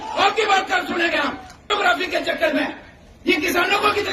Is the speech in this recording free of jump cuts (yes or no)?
no